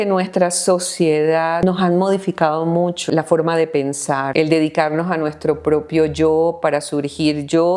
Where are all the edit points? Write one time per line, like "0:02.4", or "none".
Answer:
0:01.6
0:03.1
0:04.3